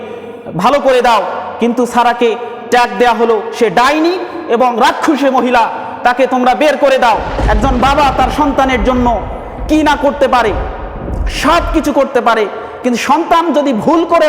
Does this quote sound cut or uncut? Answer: cut